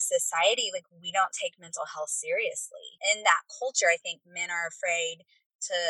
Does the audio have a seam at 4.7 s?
no; 1 cut; at 2.9 s

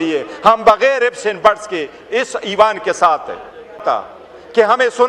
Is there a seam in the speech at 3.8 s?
yes; 1 cut; at 3.8 s

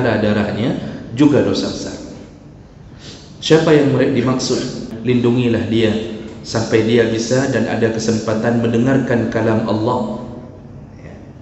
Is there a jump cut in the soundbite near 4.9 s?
yes; 1 cut; at 4.9 s

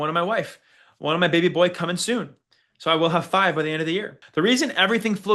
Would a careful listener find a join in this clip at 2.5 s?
no; 1 cut; at 4.2 s

